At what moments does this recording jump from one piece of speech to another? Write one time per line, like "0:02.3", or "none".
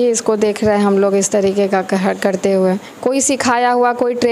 none